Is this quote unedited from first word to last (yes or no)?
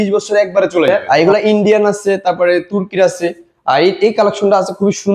no